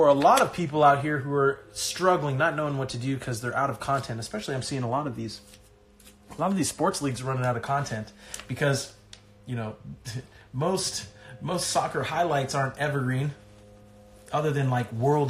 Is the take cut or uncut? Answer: uncut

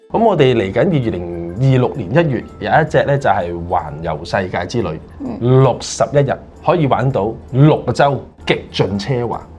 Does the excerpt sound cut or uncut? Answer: cut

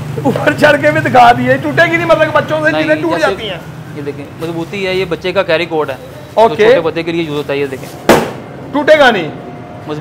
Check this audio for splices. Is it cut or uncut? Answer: uncut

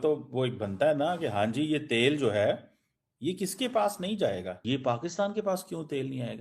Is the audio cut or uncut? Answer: cut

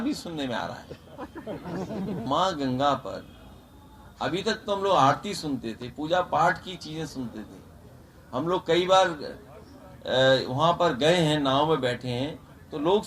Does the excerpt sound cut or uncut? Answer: cut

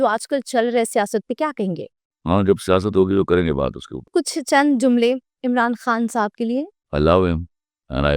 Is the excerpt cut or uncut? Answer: cut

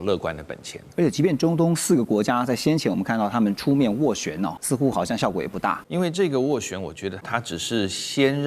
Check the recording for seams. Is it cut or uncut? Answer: cut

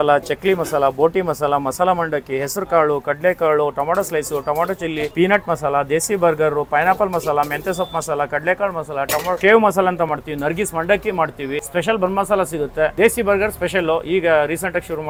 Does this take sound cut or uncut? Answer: uncut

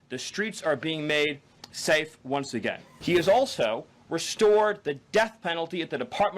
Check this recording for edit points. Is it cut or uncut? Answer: cut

